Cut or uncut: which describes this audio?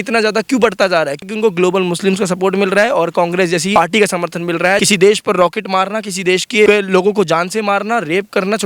cut